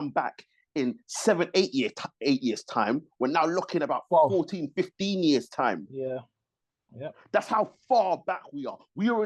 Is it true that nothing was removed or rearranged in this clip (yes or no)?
yes